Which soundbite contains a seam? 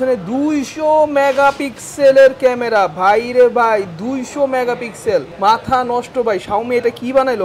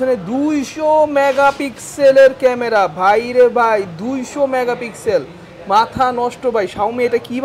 first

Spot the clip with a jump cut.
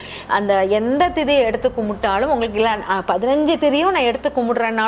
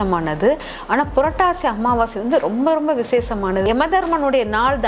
second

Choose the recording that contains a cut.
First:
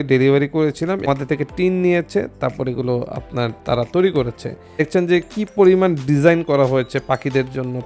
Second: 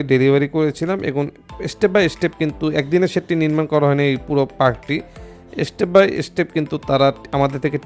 first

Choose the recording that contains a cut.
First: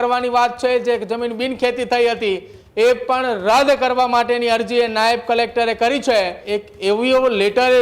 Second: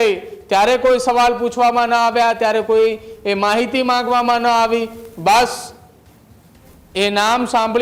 first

